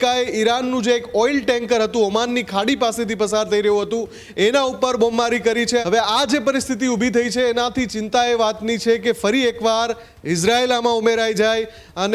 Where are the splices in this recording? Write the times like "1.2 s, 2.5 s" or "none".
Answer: 5.8 s